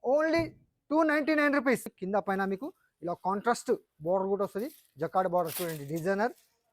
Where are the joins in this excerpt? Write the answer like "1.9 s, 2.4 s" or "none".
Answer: 1.9 s